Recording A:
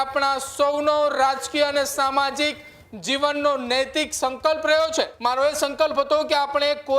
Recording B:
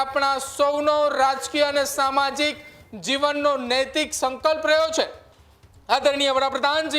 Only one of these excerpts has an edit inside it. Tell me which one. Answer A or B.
A